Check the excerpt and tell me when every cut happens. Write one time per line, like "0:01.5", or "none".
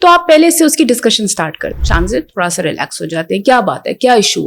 0:01.8